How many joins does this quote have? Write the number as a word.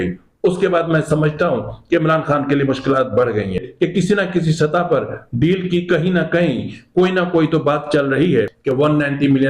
two